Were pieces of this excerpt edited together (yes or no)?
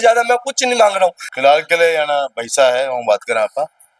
no